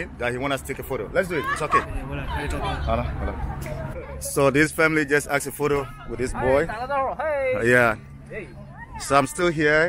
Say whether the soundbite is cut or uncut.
cut